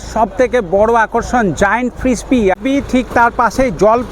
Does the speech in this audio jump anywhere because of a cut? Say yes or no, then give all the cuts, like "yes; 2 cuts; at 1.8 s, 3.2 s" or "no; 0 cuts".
yes; 1 cut; at 2.6 s